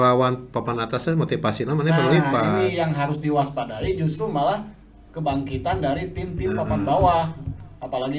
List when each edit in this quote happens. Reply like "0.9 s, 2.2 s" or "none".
none

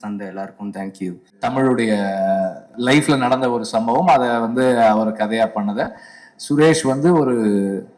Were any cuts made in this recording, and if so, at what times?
1.4 s, 2.7 s

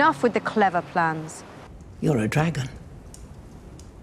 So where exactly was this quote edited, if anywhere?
1.8 s

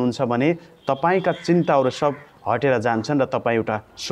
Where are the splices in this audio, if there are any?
none

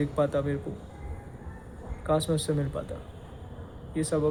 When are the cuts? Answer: none

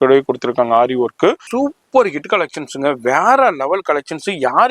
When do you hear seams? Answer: 1.4 s

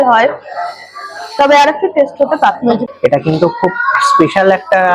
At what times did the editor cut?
2.8 s

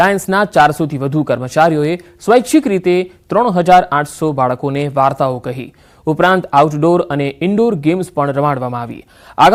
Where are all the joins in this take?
none

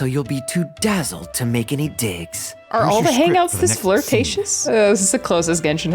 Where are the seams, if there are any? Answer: 4.6 s

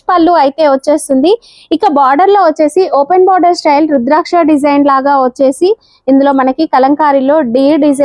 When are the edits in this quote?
none

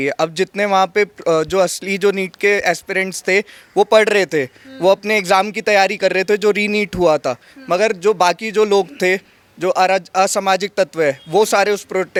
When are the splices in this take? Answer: none

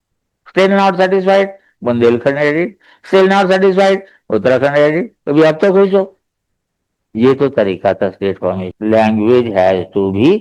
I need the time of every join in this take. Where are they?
8.7 s

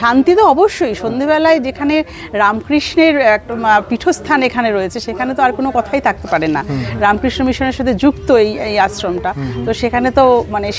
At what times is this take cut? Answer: none

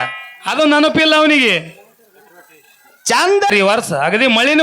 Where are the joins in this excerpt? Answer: 3.5 s

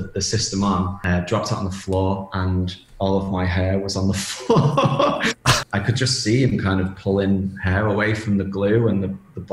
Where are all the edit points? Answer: 1.0 s, 5.6 s

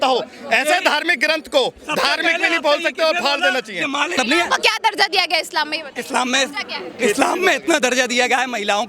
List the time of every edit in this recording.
4.1 s

